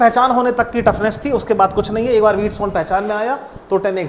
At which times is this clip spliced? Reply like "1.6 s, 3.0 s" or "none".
none